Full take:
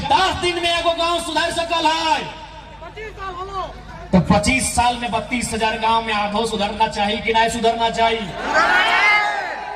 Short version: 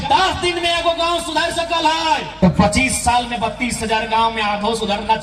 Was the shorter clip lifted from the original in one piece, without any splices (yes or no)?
no